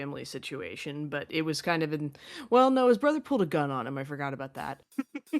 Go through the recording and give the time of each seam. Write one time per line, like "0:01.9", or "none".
0:04.5